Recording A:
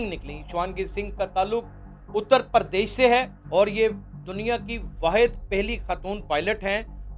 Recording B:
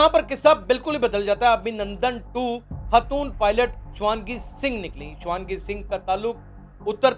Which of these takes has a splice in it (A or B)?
A